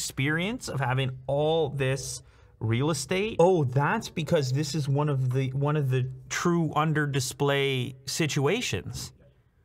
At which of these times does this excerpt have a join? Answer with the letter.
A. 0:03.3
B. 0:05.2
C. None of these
A